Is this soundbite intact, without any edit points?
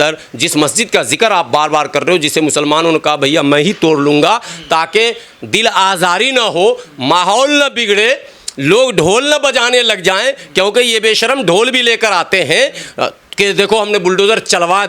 yes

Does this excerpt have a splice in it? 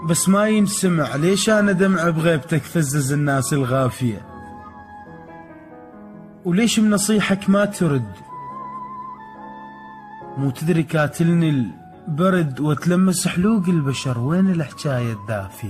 no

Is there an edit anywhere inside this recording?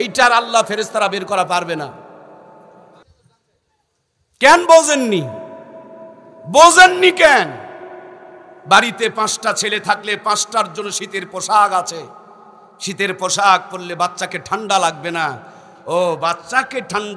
yes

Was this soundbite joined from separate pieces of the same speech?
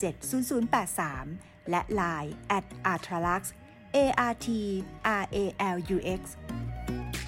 yes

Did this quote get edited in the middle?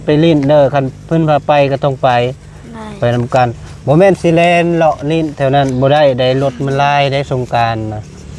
no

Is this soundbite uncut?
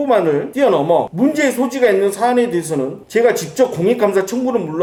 yes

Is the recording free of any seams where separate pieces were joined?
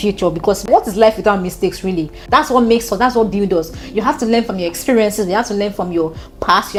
yes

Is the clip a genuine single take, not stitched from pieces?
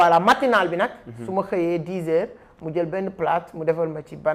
yes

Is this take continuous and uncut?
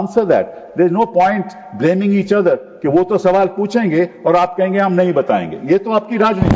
yes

